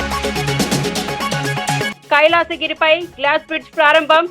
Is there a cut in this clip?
yes; 1 cut; at 1.9 s

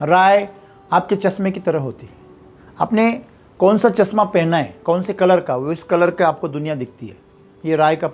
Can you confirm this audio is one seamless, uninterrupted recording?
yes; 0 cuts

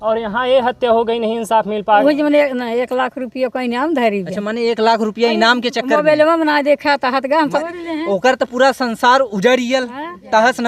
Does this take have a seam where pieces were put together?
yes; 2 cuts; at 2.0 s, 7.6 s

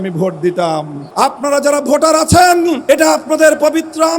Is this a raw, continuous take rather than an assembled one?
no; 2 cuts; at 1.0 s, 2.8 s

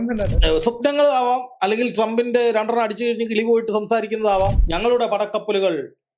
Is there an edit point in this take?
yes; 1 cut; at 4.7 s

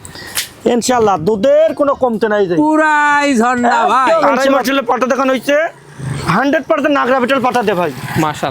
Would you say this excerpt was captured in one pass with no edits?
no; 1 cut; at 4.5 s

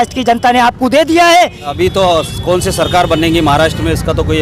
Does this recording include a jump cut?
yes; 1 cut; at 1.7 s

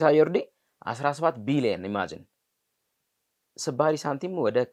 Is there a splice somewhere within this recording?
no; 0 cuts

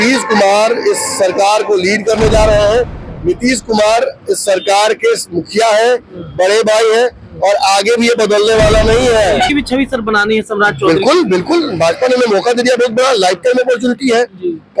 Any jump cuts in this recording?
yes; 1 cut; at 9.5 s

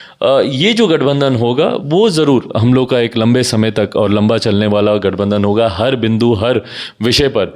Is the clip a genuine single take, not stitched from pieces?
yes; 0 cuts

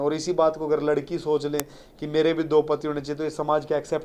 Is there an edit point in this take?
no; 0 cuts

